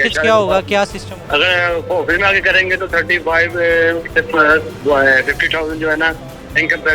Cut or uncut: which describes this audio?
cut